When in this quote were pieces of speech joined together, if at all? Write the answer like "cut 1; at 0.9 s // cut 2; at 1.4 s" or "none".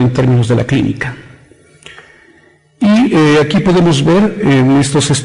cut 1; at 1.7 s

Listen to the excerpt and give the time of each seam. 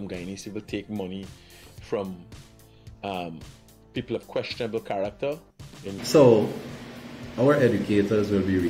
cut 1; at 5.9 s

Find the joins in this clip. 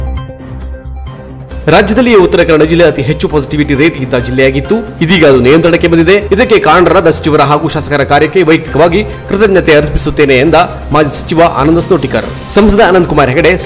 cut 1; at 1.1 s

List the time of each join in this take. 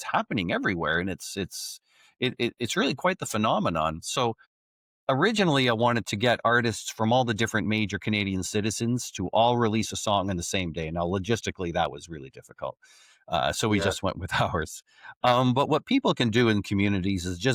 none

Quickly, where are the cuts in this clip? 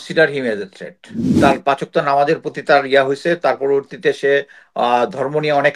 cut 1; at 1.2 s

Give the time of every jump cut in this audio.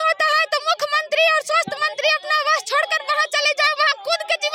none

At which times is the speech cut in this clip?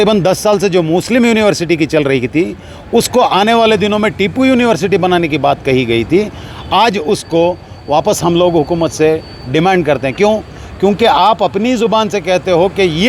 none

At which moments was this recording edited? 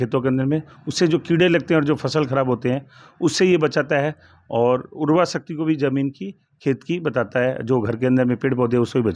none

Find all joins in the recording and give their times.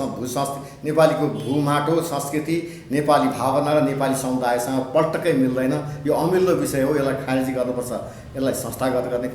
none

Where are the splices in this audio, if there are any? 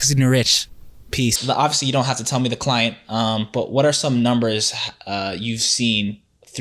cut 1; at 1.3 s

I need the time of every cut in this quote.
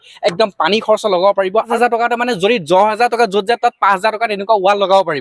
cut 1; at 1.7 s

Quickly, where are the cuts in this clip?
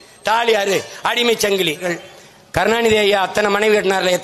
cut 1; at 1.9 s

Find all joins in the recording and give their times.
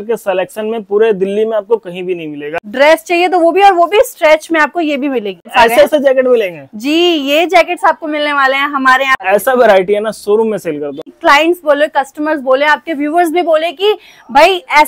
cut 1; at 2.5 s // cut 2; at 5.5 s // cut 3; at 9.2 s // cut 4; at 11.1 s

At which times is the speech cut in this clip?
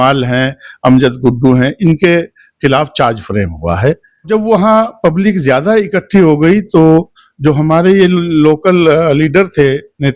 cut 1; at 4.3 s

